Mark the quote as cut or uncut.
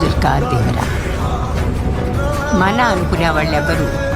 cut